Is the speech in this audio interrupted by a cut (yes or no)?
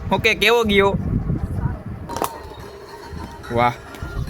yes